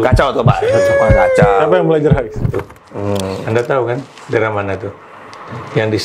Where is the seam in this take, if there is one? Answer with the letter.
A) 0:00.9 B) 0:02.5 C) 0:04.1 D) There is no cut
B